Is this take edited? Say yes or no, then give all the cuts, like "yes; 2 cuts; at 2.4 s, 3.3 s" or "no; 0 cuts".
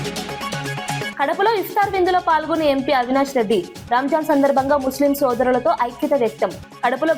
yes; 1 cut; at 1.1 s